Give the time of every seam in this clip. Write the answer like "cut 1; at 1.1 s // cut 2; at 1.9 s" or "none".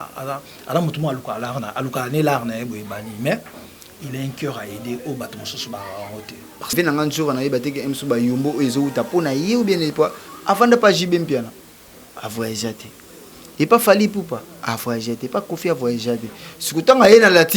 cut 1; at 6.7 s